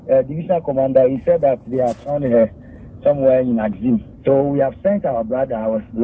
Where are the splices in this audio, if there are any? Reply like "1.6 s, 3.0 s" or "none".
none